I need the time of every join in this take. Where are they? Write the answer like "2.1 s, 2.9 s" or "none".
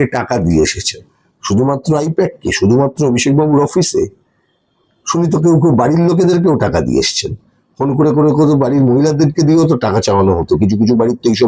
none